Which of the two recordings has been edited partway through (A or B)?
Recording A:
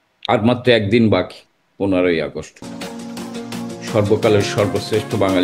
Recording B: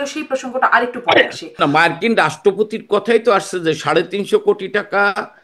B